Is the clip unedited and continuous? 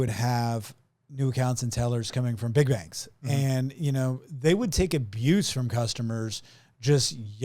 yes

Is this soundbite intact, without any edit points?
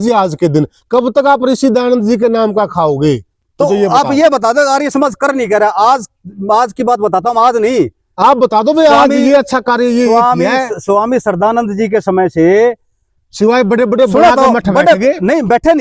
yes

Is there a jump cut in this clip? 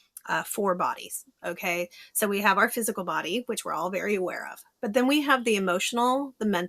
no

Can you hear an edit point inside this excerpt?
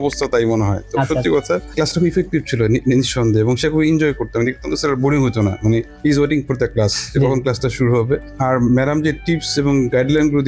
yes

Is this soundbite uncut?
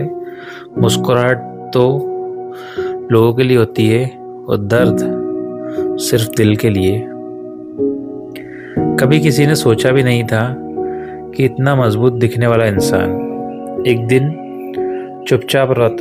no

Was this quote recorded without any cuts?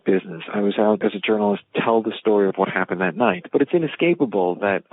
no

